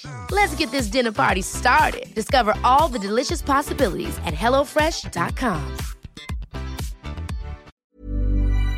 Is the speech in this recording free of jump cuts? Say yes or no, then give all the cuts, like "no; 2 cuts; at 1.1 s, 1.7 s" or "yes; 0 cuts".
no; 1 cut; at 7.7 s